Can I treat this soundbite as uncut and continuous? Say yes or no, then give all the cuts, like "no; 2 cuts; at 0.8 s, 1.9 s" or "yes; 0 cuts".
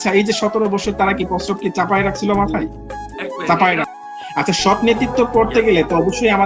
no; 1 cut; at 3.9 s